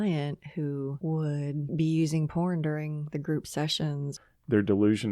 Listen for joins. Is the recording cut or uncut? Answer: cut